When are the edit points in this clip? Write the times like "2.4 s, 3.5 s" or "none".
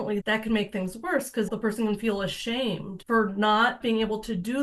1.5 s, 2.9 s, 3.8 s